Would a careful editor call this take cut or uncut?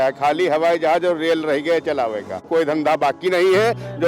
cut